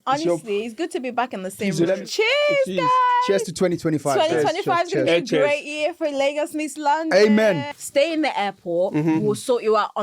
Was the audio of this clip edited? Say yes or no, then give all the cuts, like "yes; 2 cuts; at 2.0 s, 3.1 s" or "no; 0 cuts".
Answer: yes; 2 cuts; at 2.1 s, 7.7 s